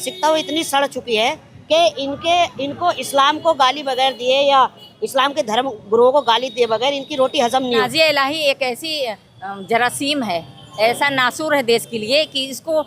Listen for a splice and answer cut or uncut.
cut